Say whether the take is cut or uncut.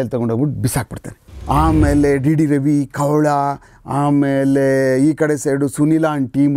cut